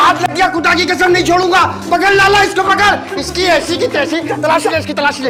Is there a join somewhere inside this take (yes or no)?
no